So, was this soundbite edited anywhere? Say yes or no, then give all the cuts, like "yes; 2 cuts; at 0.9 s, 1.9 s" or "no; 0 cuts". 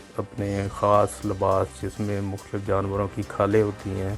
no; 0 cuts